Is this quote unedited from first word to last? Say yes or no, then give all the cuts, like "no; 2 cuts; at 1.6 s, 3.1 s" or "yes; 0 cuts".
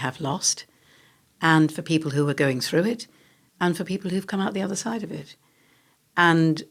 yes; 0 cuts